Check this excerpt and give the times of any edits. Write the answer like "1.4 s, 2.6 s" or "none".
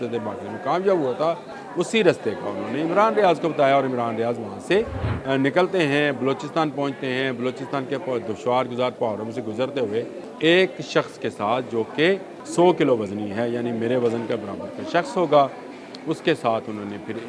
1.6 s, 5.1 s, 10.2 s, 12.4 s